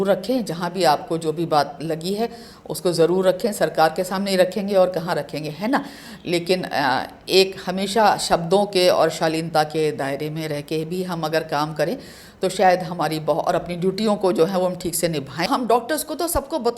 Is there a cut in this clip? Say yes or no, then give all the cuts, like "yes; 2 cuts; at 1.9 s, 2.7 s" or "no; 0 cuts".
yes; 1 cut; at 15.5 s